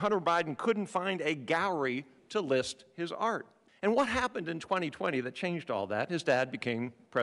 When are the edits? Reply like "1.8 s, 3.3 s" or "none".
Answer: none